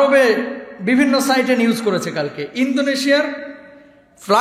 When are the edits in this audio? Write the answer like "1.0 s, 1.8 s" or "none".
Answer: none

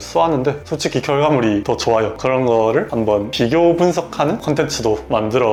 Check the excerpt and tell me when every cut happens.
none

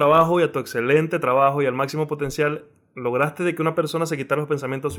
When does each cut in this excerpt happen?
none

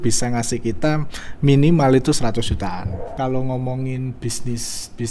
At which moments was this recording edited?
3.1 s

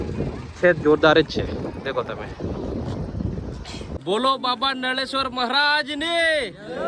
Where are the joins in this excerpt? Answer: 3.9 s

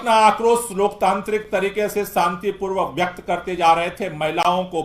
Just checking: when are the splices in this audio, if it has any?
none

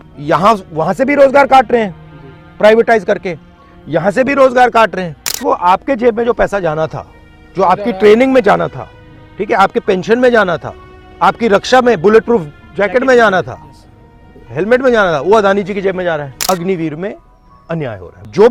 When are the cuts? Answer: 5.3 s, 16.3 s

